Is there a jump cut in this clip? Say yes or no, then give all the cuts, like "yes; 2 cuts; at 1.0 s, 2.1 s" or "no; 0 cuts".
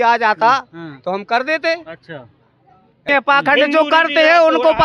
yes; 1 cut; at 3.1 s